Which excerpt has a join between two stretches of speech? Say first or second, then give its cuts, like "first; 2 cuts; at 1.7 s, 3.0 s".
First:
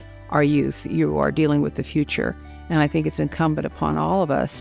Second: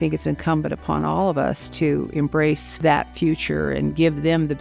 second; 1 cut; at 2.7 s